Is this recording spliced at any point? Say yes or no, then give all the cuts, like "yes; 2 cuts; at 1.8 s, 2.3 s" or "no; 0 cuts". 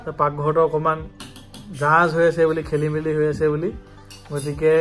no; 0 cuts